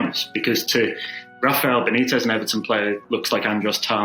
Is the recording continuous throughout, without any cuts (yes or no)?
no